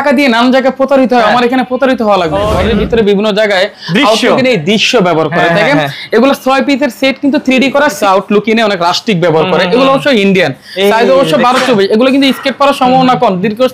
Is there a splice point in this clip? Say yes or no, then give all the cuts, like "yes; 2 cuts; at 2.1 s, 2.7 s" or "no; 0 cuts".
yes; 2 cuts; at 2.6 s, 8.0 s